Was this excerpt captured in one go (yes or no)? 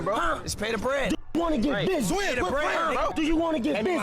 no